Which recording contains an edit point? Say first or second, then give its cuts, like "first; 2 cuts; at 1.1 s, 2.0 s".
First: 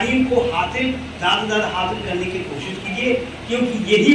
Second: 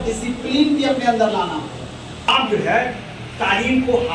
second; 1 cut; at 2.2 s